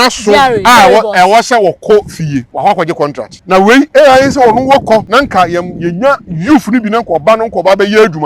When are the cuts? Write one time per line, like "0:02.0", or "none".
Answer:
0:02.5
0:03.3
0:05.1